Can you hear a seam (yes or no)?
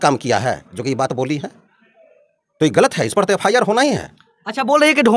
no